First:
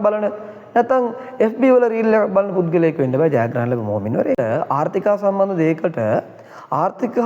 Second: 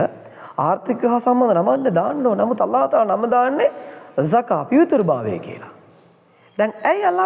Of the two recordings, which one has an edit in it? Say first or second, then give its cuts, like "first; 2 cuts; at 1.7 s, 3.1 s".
first; 1 cut; at 4.4 s